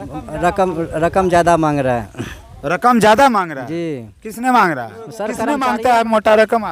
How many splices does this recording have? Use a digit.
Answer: 1